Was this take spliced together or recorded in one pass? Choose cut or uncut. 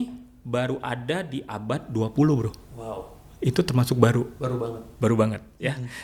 uncut